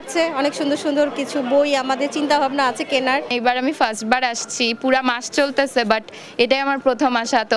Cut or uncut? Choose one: cut